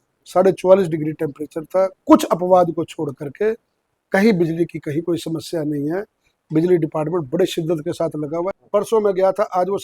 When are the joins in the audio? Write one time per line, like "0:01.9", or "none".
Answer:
0:08.6